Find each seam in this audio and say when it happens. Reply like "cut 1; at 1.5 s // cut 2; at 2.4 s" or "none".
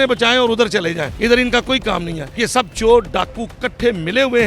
cut 1; at 2.2 s